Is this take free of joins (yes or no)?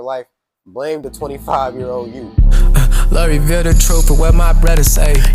no